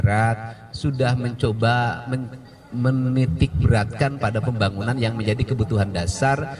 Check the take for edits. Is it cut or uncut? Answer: uncut